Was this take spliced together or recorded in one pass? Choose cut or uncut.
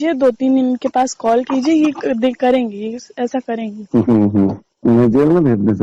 cut